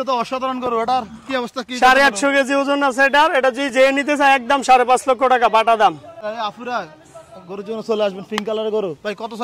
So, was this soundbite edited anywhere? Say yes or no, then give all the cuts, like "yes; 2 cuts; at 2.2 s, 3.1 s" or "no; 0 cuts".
yes; 1 cut; at 6.1 s